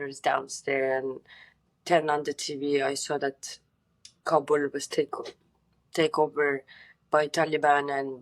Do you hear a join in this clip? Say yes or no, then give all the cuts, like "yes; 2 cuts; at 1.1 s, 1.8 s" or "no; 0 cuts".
no; 0 cuts